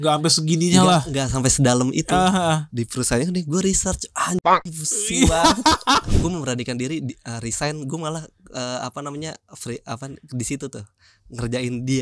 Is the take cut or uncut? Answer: cut